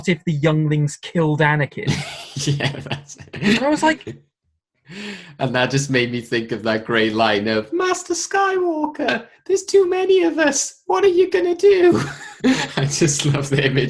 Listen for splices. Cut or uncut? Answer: uncut